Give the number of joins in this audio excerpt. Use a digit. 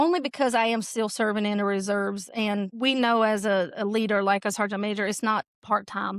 1